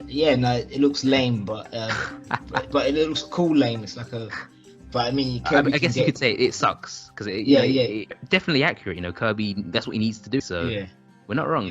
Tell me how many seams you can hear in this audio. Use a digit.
2